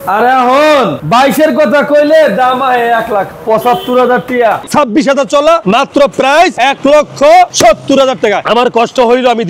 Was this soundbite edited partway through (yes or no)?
yes